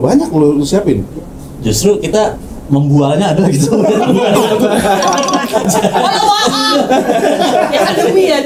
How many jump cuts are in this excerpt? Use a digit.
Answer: 0